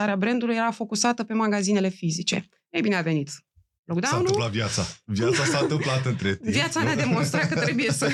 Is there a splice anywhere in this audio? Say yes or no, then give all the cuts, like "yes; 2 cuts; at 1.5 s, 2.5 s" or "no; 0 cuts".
no; 0 cuts